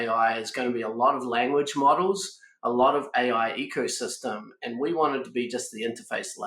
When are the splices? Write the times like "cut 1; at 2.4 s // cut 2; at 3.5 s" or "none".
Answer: none